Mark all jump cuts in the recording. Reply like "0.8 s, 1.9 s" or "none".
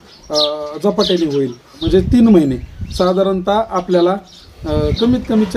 1.7 s